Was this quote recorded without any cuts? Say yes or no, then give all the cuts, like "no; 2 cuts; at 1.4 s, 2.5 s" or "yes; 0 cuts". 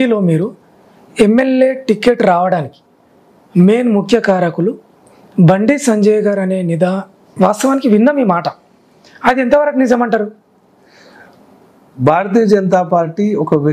yes; 0 cuts